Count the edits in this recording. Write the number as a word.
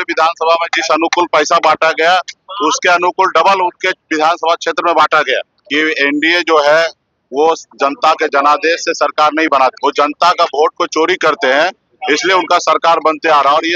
two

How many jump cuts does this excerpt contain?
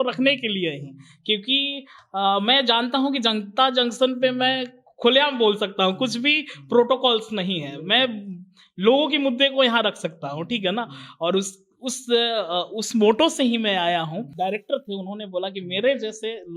one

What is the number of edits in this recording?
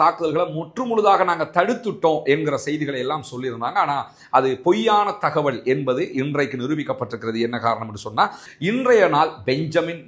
one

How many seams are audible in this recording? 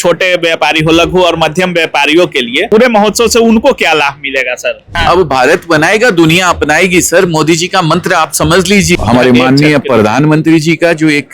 three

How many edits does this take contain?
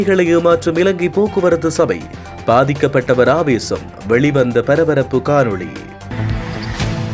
one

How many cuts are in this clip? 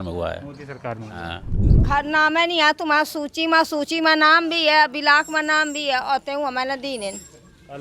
one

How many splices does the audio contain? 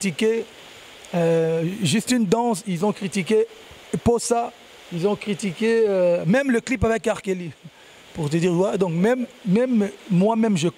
zero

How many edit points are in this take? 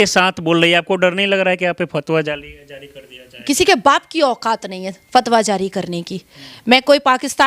zero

